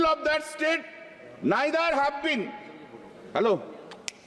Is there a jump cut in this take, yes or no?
no